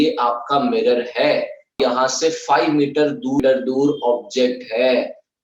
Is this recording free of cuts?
no; 2 cuts; at 1.7 s, 3.4 s

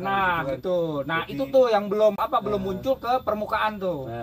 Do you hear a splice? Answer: yes; 1 cut; at 2.2 s

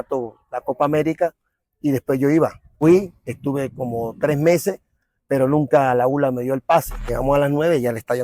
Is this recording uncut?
no; 2 cuts; at 2.7 s, 7.0 s

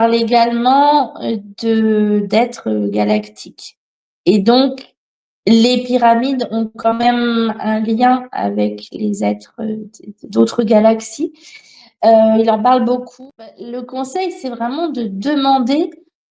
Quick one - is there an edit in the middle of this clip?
yes; 1 cut; at 13.1 s

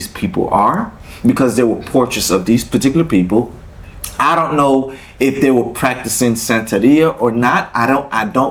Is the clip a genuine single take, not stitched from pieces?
yes; 0 cuts

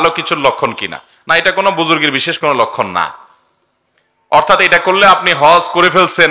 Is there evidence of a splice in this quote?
no; 0 cuts

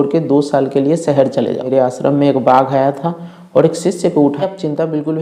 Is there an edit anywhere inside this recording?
yes; 2 cuts; at 1.7 s, 4.4 s

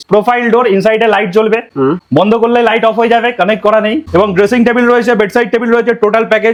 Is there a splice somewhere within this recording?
no; 0 cuts

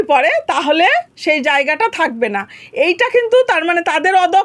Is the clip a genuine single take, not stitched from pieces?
yes; 0 cuts

